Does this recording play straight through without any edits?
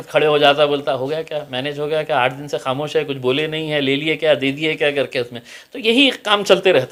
yes; 0 cuts

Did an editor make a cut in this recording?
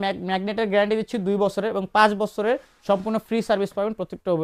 no; 0 cuts

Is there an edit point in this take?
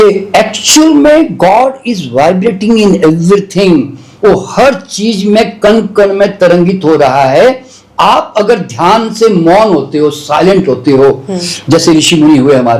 no; 0 cuts

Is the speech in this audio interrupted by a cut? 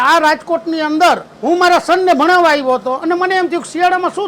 yes; 1 cut; at 1.3 s

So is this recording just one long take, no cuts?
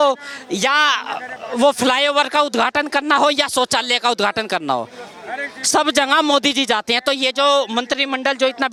yes; 0 cuts

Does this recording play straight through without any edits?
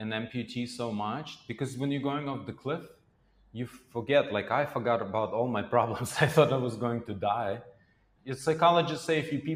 yes; 0 cuts

